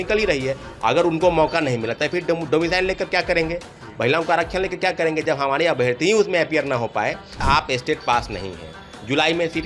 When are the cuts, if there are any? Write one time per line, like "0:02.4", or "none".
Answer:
0:07.4